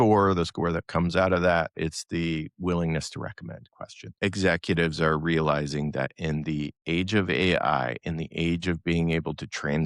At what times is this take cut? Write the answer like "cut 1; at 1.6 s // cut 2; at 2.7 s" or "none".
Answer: cut 1; at 4.1 s